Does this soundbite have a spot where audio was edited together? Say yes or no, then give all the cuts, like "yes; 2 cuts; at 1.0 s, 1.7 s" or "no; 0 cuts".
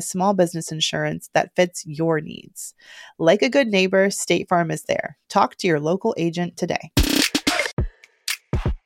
yes; 1 cut; at 7.8 s